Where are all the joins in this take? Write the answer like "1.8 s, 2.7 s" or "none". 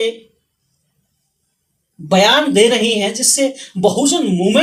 none